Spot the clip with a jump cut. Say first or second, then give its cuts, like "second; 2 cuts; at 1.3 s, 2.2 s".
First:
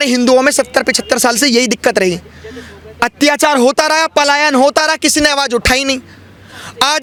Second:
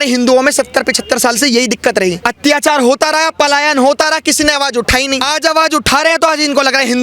second; 2 cuts; at 2.2 s, 5.2 s